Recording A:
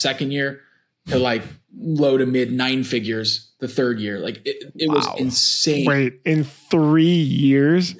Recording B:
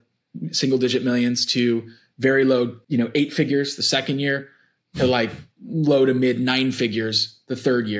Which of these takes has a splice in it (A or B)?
B